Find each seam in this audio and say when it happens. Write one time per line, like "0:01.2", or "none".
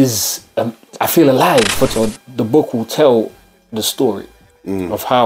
0:01.9